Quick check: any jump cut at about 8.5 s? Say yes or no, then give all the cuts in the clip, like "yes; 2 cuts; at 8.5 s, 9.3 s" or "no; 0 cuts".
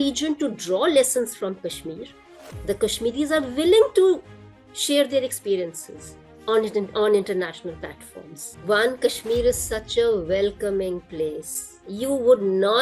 yes; 1 cut; at 8.5 s